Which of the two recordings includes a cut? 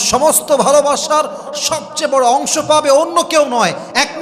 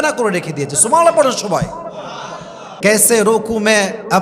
second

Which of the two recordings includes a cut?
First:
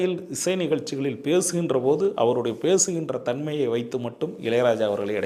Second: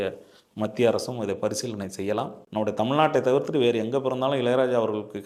second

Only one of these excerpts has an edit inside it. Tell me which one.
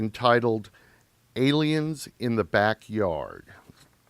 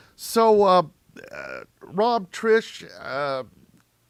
first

